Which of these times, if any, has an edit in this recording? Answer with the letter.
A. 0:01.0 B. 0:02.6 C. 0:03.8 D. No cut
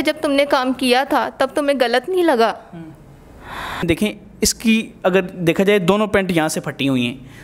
C